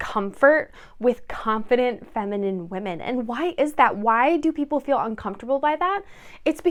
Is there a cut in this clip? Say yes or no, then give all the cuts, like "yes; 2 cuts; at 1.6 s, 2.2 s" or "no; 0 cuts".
no; 0 cuts